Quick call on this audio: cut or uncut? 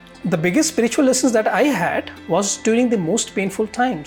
uncut